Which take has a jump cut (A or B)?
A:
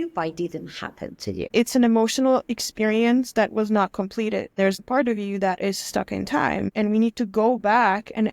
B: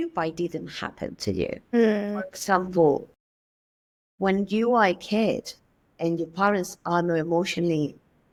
A